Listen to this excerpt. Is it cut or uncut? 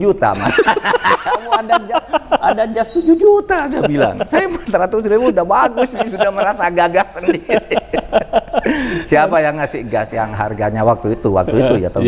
uncut